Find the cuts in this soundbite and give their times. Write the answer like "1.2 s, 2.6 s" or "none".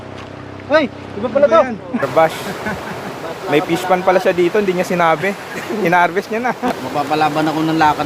2.0 s, 6.8 s